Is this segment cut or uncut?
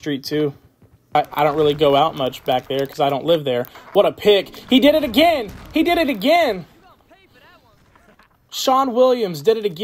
cut